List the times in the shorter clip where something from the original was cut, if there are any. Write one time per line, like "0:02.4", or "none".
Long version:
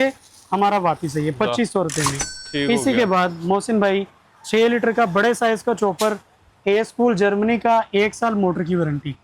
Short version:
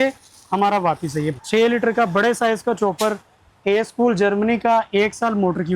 0:01.3

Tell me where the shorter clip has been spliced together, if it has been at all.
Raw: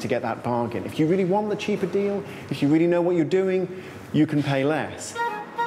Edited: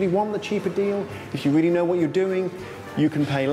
none

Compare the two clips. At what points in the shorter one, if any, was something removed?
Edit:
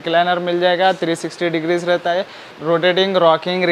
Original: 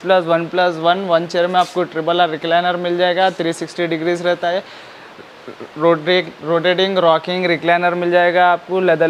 0:02.5

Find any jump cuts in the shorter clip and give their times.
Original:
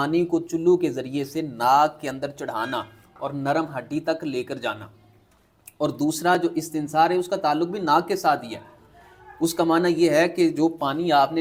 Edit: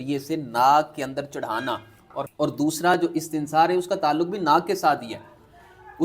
0:02.3

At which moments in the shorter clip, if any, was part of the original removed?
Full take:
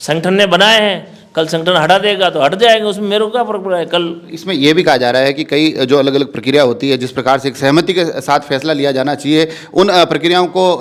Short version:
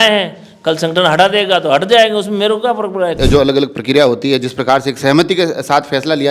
0:03.2

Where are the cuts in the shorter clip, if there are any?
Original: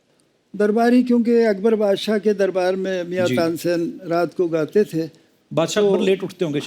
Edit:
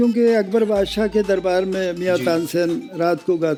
none

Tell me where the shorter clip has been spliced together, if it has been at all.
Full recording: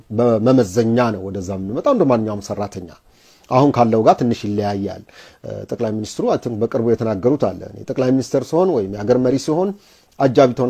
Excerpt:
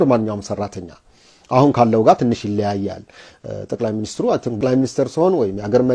0:04.6

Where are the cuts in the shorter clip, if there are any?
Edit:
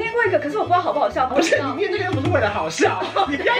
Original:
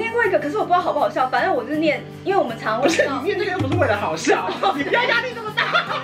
0:01.3

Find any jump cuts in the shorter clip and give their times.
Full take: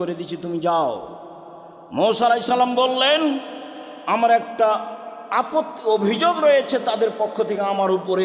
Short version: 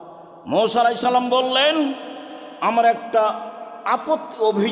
none

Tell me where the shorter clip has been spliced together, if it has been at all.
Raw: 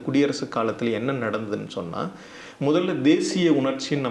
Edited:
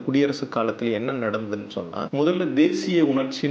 0:02.0

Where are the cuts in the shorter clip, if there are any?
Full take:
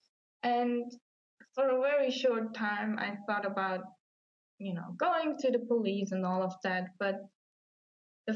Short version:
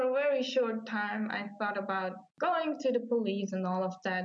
0:02.3

